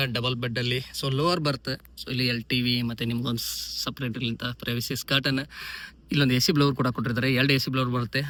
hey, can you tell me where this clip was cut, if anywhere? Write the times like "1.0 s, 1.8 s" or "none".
none